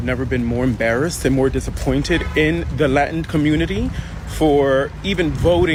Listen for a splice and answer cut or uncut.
uncut